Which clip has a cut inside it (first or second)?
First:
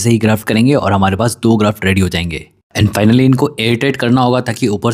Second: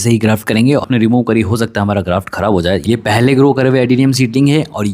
second